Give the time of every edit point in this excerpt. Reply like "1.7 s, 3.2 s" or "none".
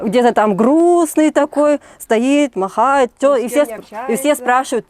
none